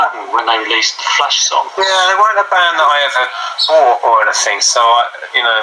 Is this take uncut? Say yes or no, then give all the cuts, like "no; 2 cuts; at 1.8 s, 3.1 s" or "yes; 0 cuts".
yes; 0 cuts